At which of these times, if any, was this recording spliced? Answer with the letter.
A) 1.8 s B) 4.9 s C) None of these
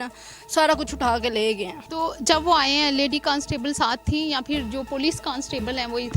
A